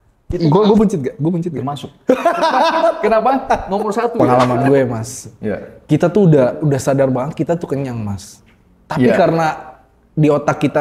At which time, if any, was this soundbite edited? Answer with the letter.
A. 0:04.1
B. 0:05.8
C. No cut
A